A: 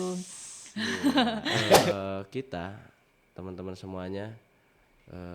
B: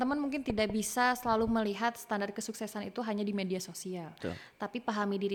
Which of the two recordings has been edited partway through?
A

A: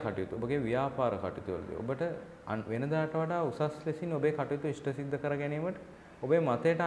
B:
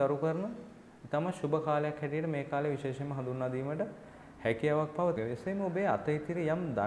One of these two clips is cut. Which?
B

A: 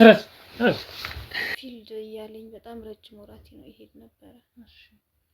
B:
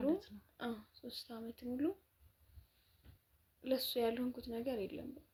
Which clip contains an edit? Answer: A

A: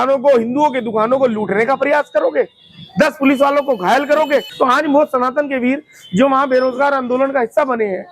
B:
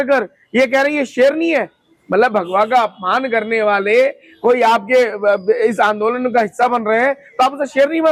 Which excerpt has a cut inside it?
A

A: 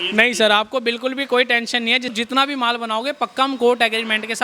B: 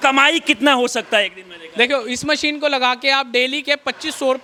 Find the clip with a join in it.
A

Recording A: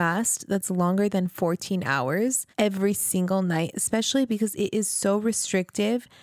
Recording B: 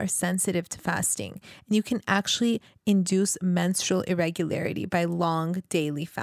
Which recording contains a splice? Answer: A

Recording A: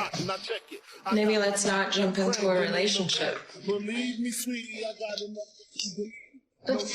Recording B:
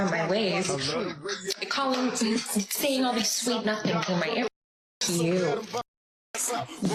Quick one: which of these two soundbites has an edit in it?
A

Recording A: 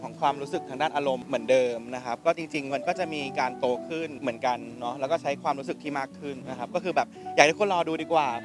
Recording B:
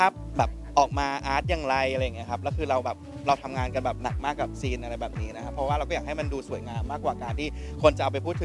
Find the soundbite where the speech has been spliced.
A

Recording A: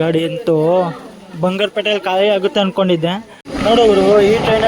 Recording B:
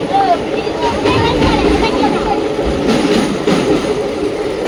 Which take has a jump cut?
A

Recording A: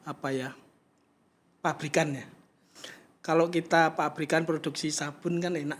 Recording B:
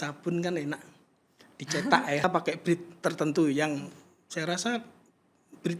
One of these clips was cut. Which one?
B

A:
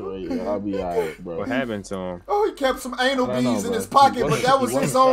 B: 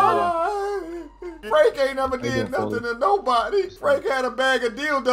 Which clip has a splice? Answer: B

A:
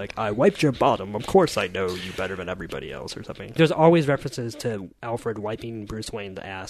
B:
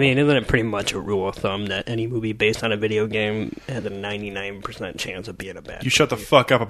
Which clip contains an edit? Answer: A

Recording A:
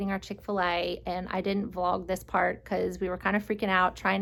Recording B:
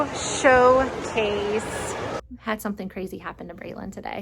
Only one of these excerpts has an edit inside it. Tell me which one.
B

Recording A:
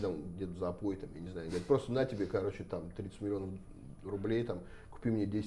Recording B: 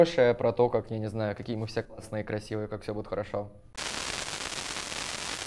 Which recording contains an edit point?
B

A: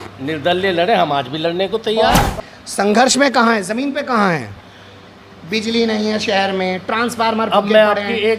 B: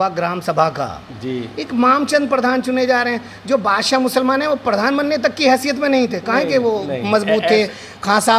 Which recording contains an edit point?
A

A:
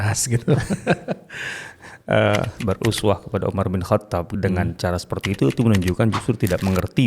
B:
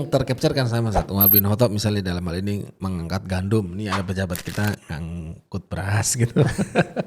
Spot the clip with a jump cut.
A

